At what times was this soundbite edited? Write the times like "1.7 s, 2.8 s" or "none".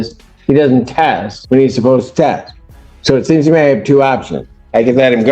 1.3 s